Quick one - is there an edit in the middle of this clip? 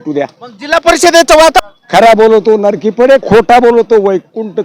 yes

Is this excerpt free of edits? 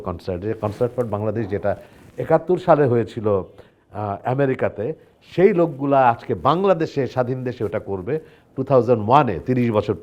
yes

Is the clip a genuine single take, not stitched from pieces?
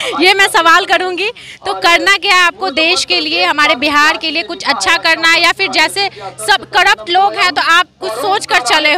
yes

